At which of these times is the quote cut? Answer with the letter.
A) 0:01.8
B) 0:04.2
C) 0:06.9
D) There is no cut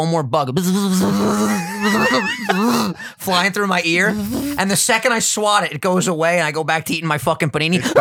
D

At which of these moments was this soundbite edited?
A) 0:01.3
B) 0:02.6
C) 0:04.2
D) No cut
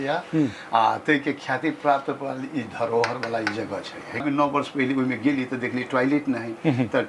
C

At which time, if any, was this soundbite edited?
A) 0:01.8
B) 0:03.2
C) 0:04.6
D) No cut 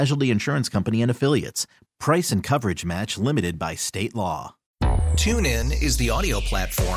C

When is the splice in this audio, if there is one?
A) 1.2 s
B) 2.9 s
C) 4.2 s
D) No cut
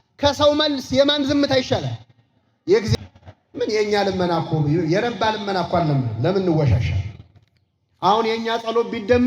B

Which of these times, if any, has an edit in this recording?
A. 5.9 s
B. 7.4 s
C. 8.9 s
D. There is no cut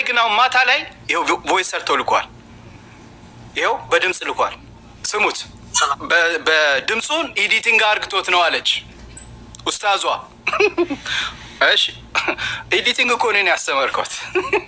A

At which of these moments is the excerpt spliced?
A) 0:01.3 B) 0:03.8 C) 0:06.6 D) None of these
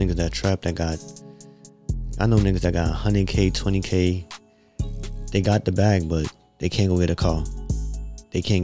D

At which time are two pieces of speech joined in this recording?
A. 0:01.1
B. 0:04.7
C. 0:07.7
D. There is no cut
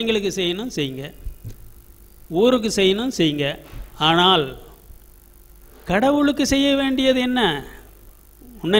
D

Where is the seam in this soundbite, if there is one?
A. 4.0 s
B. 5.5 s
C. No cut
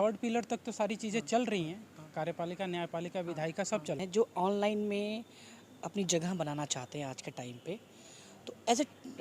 A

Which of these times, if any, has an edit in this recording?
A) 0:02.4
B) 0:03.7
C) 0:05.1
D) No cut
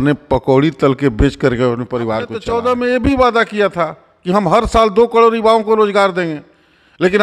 A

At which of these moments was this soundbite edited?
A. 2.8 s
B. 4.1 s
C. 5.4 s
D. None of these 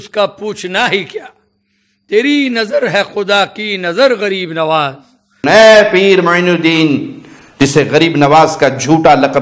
C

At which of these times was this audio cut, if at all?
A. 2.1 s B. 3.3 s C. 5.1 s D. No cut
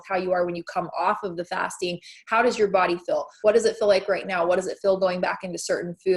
B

